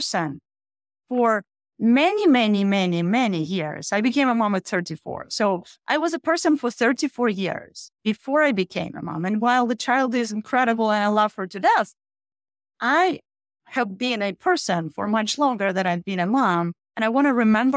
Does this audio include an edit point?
yes; 1 cut; at 16.8 s

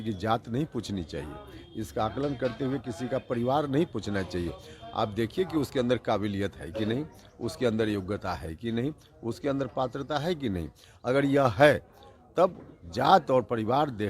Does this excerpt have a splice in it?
no; 0 cuts

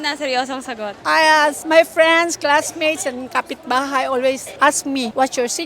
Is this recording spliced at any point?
yes; 1 cut; at 0.9 s

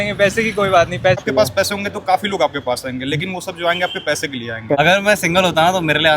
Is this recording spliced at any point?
yes; 2 cuts; at 1.2 s, 4.7 s

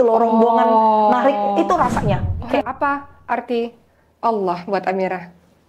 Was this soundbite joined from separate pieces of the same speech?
yes; 1 cut; at 2.6 s

